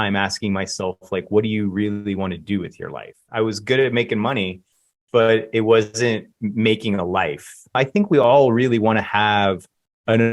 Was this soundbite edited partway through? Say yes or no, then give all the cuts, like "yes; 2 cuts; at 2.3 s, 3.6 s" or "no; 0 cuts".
yes; 2 cuts; at 3.2 s, 7.8 s